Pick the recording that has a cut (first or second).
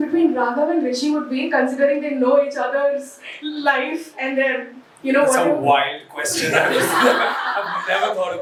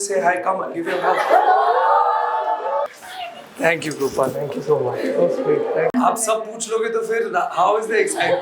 second